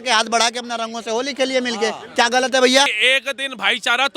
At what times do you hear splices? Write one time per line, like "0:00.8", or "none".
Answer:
0:03.0